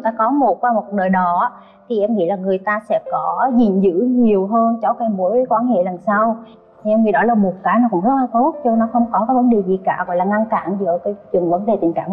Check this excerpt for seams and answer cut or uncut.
uncut